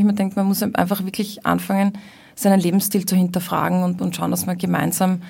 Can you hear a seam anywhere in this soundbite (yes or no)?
no